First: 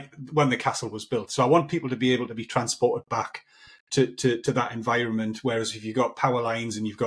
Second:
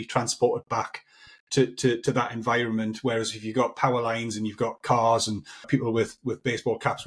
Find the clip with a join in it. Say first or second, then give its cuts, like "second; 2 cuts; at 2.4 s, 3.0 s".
second; 1 cut; at 5.7 s